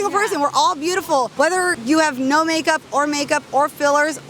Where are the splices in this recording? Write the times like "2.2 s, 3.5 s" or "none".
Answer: 1.8 s